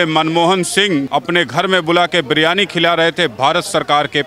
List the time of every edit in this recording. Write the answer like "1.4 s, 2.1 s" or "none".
1.1 s